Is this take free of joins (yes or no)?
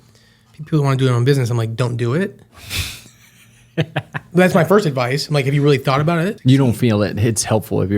no